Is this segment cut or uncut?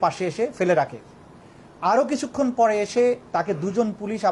uncut